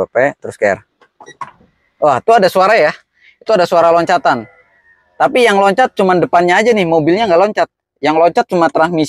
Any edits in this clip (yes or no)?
no